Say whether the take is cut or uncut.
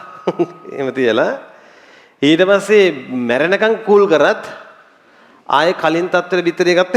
uncut